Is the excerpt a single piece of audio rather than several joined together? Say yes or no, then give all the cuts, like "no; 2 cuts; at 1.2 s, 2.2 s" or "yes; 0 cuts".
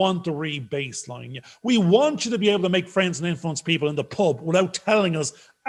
yes; 0 cuts